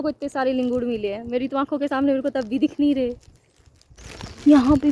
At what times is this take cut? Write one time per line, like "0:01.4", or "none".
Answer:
none